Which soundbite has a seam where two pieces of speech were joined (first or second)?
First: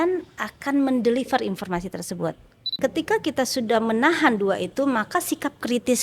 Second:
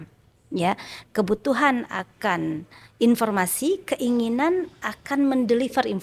first